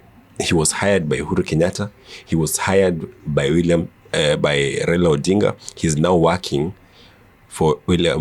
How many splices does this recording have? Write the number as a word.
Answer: zero